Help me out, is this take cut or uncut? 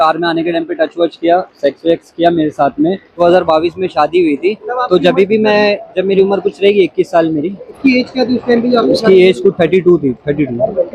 cut